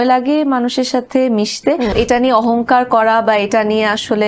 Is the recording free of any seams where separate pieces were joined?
no; 1 cut; at 1.9 s

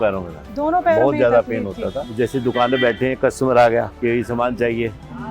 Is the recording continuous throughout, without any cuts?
no; 2 cuts; at 2.0 s, 3.9 s

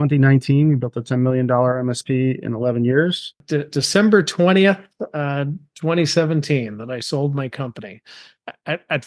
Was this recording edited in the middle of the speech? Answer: yes; 1 cut; at 3.4 s

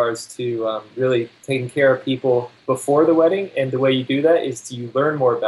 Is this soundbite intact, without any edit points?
no; 2 cuts; at 1.4 s, 2.5 s

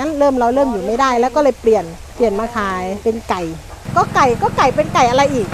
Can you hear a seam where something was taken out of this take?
yes; 3 cuts; at 2.0 s, 3.0 s, 3.8 s

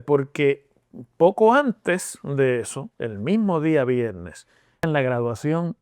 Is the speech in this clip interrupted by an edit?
yes; 1 cut; at 4.8 s

